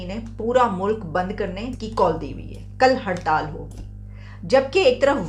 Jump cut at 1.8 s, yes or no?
yes